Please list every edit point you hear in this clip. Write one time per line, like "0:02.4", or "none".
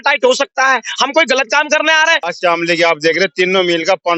0:02.2